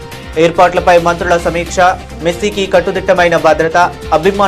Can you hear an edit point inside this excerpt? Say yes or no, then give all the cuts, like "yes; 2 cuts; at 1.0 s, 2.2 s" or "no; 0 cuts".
no; 0 cuts